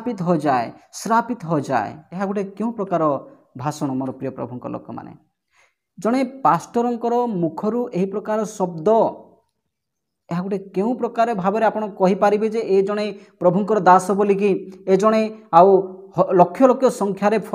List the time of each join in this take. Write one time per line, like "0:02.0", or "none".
0:02.0